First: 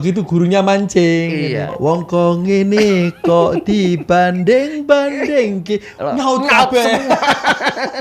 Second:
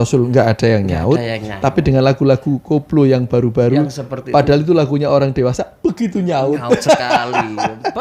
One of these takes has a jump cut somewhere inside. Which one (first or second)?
first